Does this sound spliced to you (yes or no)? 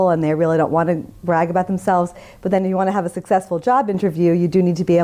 no